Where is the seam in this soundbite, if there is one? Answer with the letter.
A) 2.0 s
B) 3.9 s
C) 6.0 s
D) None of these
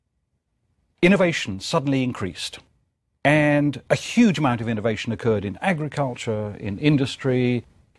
D